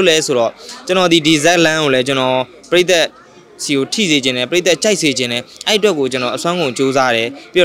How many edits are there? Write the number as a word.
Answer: zero